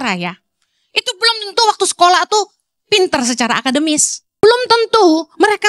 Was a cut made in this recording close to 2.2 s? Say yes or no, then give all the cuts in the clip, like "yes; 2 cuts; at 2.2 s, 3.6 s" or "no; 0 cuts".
no; 1 cut; at 4.4 s